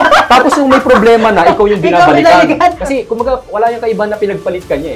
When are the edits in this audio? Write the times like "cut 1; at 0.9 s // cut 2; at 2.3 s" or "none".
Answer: cut 1; at 2.8 s